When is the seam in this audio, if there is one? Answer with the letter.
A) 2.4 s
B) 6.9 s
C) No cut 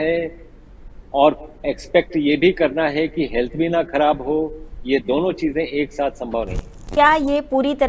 B